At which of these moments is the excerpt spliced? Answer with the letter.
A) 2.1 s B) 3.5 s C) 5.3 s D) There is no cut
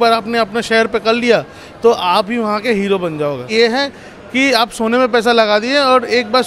B